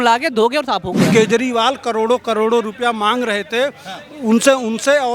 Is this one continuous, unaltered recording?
no; 1 cut; at 1.0 s

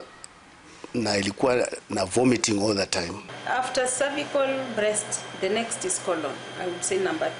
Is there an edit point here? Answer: yes; 1 cut; at 3.3 s

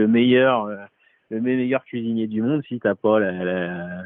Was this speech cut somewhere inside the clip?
no; 0 cuts

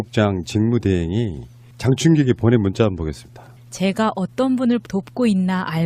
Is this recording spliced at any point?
no; 0 cuts

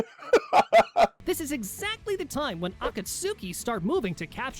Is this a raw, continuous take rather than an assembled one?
no; 1 cut; at 1.2 s

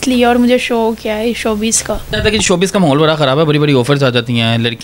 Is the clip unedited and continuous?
no; 1 cut; at 2.2 s

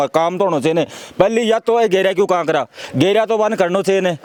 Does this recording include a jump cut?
no; 0 cuts

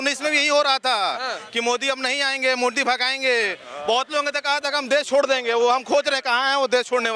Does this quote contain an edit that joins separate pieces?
no; 0 cuts

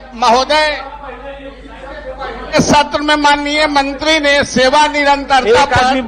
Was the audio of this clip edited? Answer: no; 0 cuts

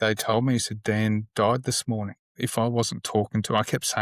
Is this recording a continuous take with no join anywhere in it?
no; 1 cut; at 2.4 s

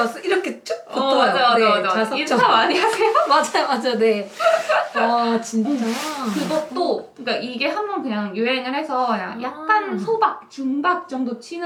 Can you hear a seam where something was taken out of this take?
no; 0 cuts

